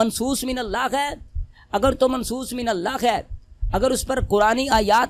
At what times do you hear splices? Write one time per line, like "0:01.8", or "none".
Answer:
none